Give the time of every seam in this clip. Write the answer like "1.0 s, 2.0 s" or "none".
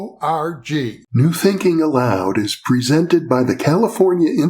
1.0 s